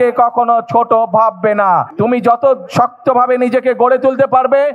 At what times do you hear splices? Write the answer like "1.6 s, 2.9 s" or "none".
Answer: 1.9 s